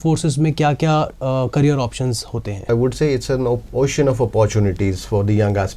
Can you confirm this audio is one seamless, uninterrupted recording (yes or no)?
no